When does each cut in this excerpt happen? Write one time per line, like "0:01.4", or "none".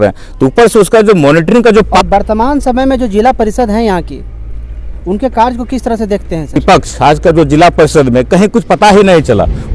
0:01.9
0:06.6

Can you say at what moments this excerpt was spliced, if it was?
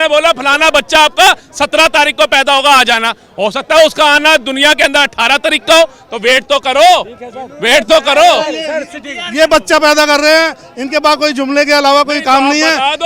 none

